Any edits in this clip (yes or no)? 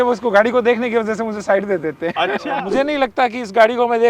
yes